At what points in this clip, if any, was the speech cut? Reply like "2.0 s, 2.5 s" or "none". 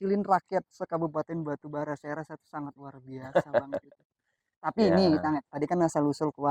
none